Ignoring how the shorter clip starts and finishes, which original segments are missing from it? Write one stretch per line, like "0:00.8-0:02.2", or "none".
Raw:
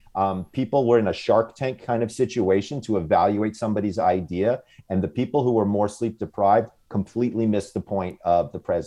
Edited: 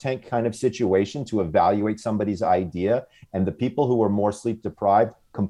none